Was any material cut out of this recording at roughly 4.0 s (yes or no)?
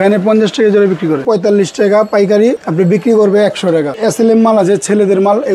yes